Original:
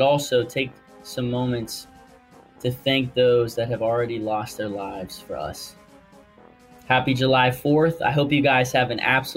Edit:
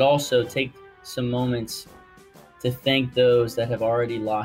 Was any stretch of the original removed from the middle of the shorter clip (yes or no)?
no